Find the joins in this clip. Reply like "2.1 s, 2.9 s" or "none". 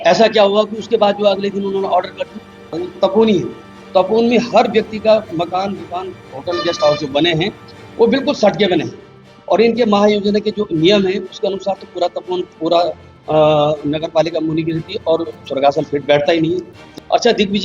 2.9 s, 16.9 s